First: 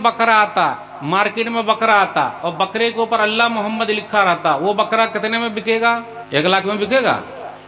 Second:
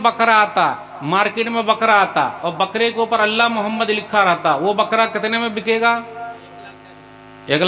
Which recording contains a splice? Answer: first; 1 cut; at 6.1 s

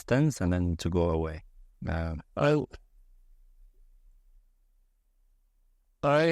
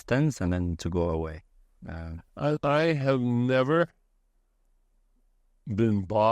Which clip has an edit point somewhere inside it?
second; 1 cut; at 2.6 s

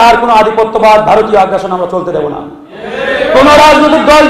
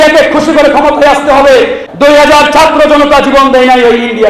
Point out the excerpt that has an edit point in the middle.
second; 1 cut; at 1.8 s

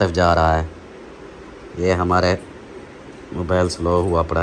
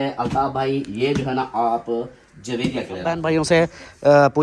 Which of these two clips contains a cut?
second; 1 cut; at 3.2 s

